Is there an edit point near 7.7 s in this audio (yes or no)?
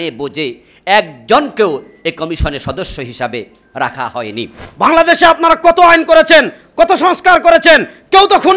no